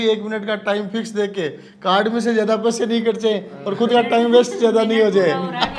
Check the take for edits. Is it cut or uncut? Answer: uncut